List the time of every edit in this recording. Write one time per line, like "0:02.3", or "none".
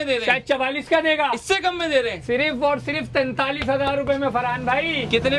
none